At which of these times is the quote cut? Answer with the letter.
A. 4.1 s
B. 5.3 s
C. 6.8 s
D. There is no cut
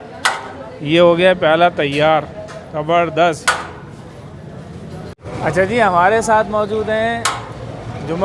D